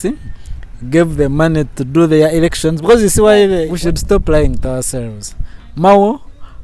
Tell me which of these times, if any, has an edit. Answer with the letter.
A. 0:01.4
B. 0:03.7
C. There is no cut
B